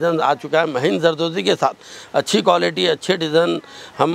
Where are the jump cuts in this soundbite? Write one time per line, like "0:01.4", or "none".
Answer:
none